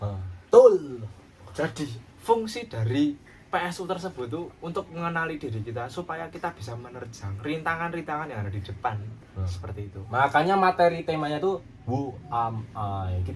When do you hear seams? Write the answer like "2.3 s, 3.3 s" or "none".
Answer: none